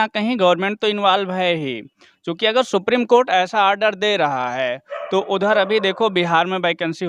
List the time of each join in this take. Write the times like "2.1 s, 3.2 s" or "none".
none